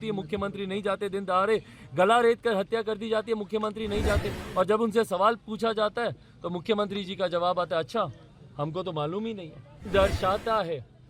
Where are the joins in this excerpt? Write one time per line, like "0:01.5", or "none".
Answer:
0:09.9

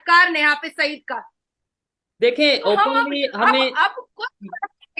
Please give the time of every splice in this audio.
none

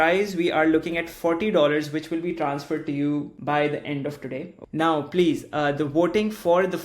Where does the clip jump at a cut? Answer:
0:03.3
0:04.6

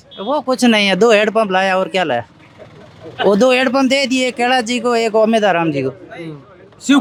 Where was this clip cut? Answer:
none

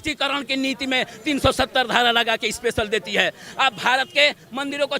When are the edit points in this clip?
none

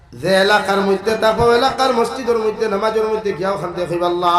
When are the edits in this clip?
none

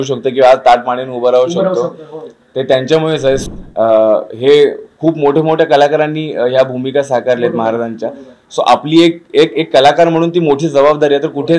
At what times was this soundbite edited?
0:03.4

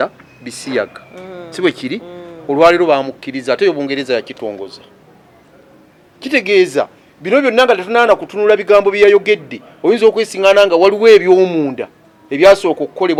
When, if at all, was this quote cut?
none

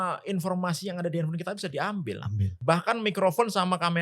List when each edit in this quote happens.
0:02.6

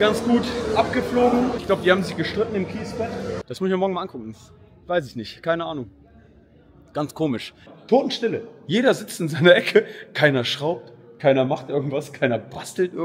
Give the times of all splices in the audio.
0:03.4
0:07.7

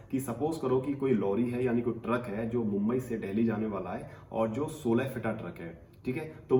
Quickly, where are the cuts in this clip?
none

